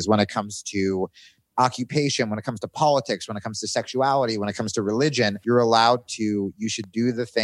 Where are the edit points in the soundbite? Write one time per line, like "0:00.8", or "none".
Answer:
0:05.4